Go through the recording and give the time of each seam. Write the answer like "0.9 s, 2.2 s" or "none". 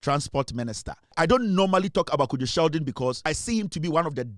1.1 s, 3.2 s